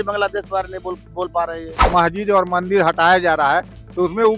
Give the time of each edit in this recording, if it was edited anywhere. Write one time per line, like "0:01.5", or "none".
0:01.8